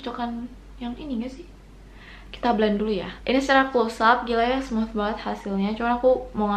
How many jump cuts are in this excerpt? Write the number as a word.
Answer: one